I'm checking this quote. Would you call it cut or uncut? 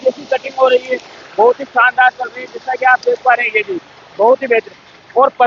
uncut